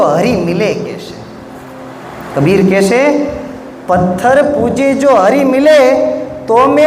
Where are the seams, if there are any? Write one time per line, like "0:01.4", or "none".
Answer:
none